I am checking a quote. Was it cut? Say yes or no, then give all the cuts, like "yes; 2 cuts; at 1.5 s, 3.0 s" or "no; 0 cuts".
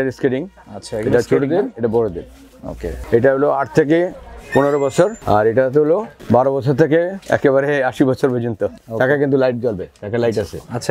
yes; 4 cuts; at 2.9 s, 5.2 s, 6.1 s, 8.8 s